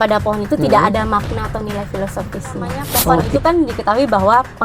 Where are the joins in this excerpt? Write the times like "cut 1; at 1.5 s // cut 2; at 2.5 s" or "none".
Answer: cut 1; at 3.3 s